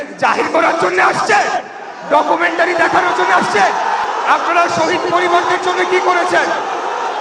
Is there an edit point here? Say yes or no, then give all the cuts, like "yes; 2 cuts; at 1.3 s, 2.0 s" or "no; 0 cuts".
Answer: yes; 1 cut; at 4.0 s